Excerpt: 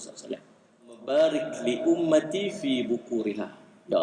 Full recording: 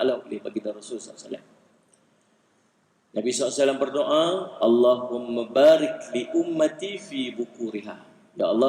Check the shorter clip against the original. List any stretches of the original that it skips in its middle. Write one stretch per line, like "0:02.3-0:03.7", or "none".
0:02.0-0:05.5